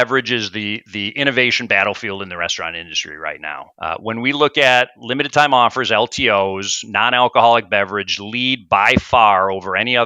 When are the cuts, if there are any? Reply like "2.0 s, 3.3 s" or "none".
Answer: 3.7 s

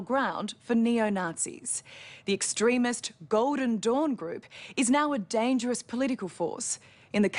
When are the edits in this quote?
none

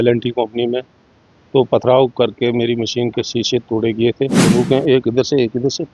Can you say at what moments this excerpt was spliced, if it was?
4.4 s

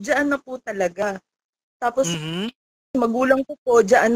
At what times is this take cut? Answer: none

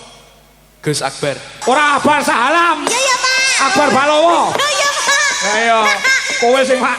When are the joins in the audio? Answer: 1.5 s

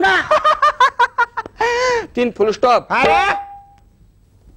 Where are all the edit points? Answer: none

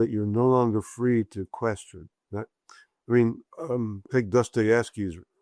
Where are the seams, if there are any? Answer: 3.5 s

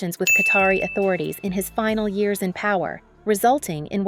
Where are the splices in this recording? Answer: 3.1 s

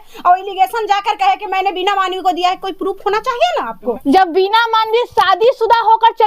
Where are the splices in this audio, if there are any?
4.0 s

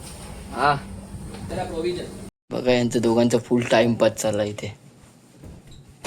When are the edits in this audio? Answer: 2.2 s

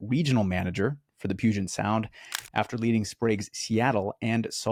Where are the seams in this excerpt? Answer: none

